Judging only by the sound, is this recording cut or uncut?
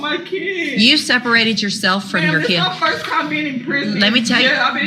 uncut